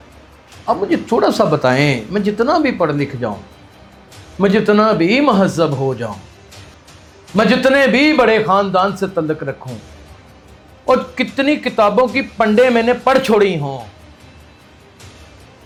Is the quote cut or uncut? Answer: uncut